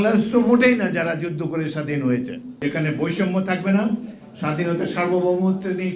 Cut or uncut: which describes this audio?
cut